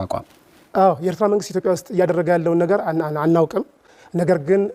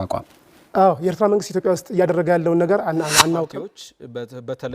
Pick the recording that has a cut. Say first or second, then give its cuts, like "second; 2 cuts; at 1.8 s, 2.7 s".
second; 1 cut; at 3.5 s